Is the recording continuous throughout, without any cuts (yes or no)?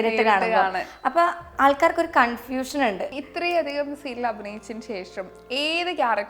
no